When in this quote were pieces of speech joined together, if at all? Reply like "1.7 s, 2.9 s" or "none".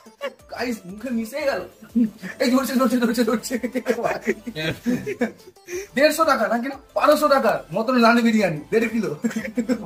none